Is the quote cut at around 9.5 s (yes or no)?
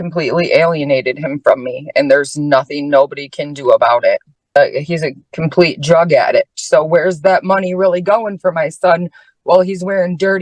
no